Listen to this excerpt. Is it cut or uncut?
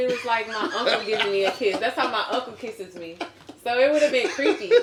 uncut